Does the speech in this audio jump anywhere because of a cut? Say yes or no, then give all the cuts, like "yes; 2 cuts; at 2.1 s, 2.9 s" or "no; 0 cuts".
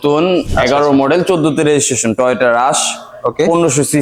no; 0 cuts